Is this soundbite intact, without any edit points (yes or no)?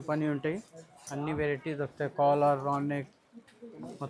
yes